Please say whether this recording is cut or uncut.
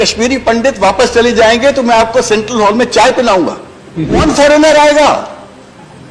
cut